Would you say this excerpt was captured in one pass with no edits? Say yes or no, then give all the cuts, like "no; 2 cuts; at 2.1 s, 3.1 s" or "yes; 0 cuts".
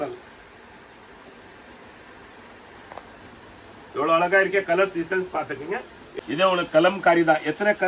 no; 1 cut; at 6.0 s